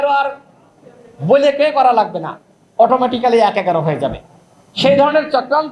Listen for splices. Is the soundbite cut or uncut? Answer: uncut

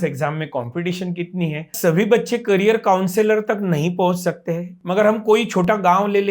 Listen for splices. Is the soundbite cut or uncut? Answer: cut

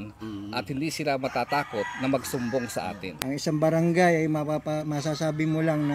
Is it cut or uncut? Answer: cut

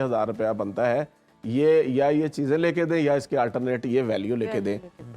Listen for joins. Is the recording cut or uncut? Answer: uncut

